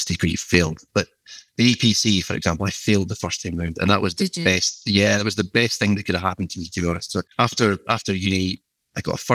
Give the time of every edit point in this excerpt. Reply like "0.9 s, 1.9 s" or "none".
7.3 s